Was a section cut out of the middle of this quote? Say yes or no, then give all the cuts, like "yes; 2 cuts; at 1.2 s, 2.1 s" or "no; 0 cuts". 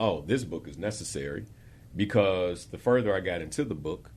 no; 0 cuts